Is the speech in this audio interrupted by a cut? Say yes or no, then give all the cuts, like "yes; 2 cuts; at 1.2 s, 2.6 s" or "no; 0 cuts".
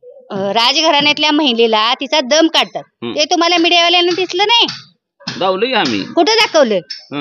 no; 0 cuts